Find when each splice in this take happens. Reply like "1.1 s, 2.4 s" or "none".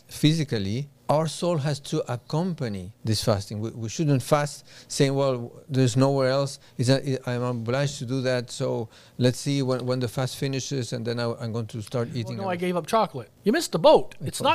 0.9 s, 2.9 s, 12.4 s, 13.3 s